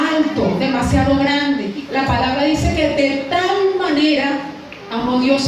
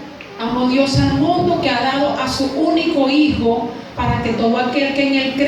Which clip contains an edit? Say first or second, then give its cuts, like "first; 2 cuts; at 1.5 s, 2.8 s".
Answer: first; 1 cut; at 1.7 s